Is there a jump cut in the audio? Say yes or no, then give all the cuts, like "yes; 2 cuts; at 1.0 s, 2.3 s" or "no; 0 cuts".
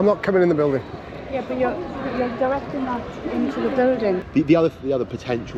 yes; 1 cut; at 4.2 s